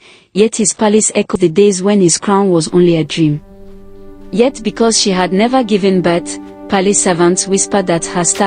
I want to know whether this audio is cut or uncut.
cut